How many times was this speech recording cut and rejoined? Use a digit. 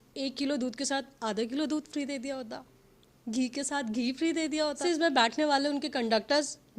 1